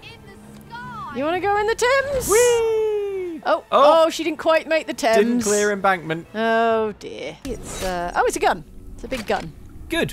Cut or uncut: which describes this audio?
cut